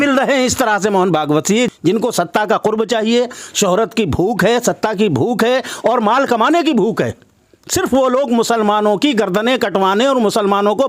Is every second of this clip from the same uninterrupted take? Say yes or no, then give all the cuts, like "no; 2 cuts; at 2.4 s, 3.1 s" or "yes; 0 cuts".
no; 1 cut; at 1.7 s